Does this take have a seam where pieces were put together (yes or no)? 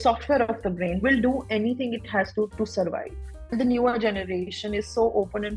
yes